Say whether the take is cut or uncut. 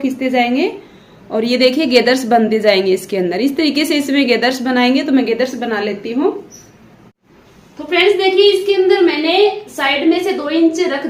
uncut